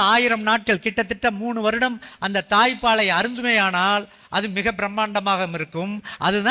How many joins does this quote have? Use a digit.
0